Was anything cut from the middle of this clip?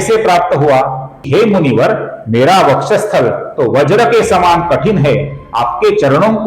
yes; 1 cut; at 1.2 s

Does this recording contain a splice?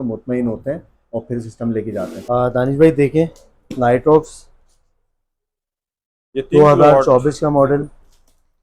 yes; 1 cut; at 2.1 s

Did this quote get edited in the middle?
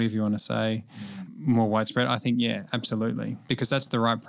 yes; 2 cuts; at 1.0 s, 3.4 s

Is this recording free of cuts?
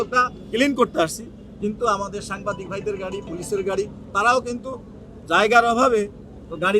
yes; 0 cuts

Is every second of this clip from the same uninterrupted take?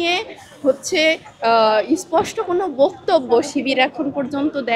yes; 0 cuts

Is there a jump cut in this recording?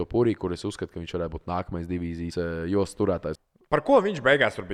yes; 2 cuts; at 2.3 s, 3.3 s

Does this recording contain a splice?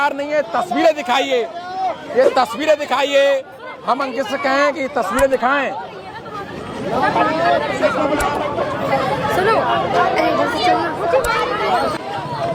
no; 0 cuts

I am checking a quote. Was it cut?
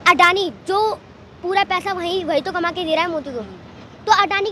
no; 0 cuts

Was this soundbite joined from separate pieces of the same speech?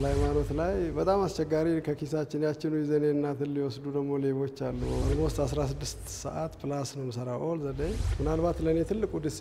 yes; 2 cuts; at 5.0 s, 8.1 s

